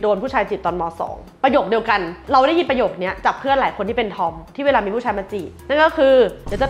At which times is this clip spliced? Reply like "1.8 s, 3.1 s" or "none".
none